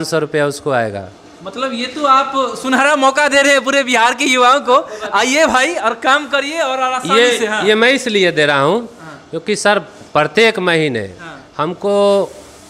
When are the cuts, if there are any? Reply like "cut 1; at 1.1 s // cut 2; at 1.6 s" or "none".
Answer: none